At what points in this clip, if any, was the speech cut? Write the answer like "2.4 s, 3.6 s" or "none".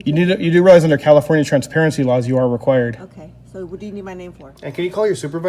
4.5 s

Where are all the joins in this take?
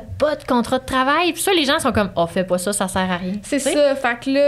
none

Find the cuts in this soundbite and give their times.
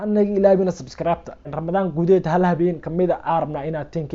1.5 s

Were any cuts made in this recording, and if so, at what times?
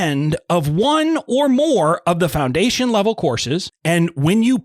3.7 s

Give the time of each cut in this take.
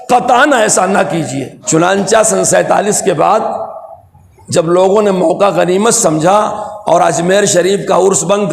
1.6 s

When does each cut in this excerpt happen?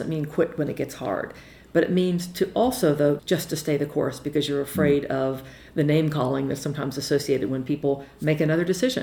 3.2 s

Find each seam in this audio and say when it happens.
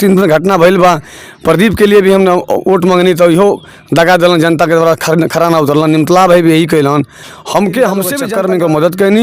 8.2 s

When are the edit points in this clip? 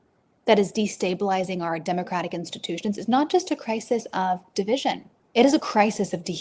5.1 s

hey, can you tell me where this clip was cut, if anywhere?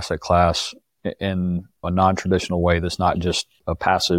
1.8 s

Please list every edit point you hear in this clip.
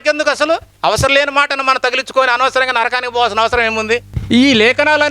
4.1 s

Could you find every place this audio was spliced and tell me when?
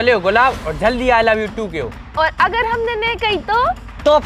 2.0 s

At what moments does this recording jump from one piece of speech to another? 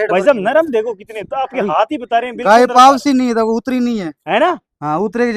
none

